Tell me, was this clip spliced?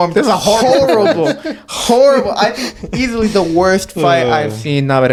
no; 0 cuts

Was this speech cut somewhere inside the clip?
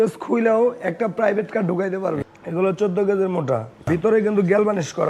yes; 2 cuts; at 2.3 s, 3.8 s

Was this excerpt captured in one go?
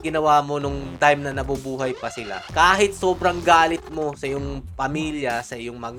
yes; 0 cuts

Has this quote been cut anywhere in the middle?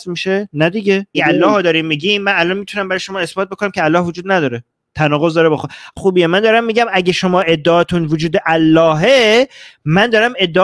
yes; 2 cuts; at 1.2 s, 5.9 s

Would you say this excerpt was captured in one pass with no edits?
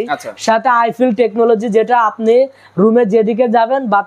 yes; 0 cuts

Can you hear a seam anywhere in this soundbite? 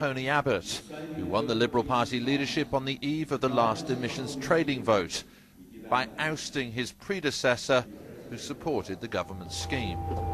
yes; 1 cut; at 5.0 s

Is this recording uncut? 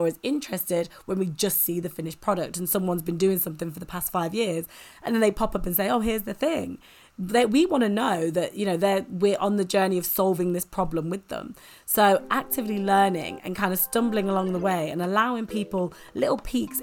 yes; 0 cuts

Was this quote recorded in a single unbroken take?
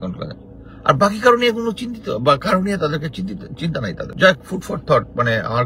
no; 1 cut; at 4.1 s

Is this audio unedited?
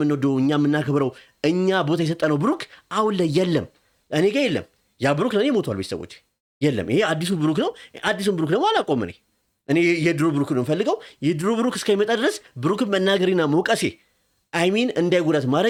yes; 0 cuts

